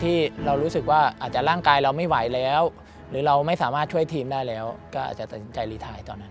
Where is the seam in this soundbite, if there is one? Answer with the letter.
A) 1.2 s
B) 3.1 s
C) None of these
A